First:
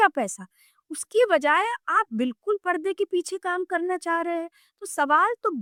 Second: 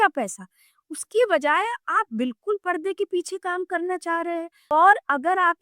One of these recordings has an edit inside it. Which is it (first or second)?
second